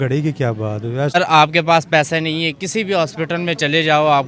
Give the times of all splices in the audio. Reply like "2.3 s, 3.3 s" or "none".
1.2 s